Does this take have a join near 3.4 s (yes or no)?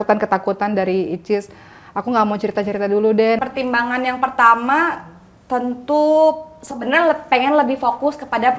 yes